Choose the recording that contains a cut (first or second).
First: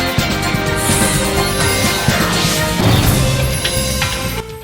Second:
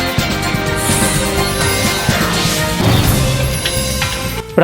first